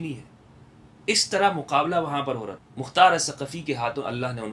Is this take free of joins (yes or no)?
no